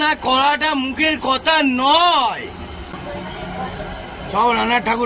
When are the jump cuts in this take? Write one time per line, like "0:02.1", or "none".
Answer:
0:02.9